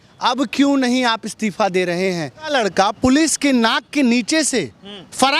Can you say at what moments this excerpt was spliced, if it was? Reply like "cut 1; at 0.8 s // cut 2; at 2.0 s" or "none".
cut 1; at 2.5 s